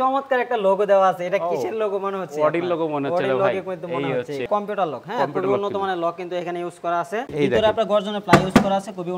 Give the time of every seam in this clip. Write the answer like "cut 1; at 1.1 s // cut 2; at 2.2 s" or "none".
cut 1; at 4.4 s // cut 2; at 7.3 s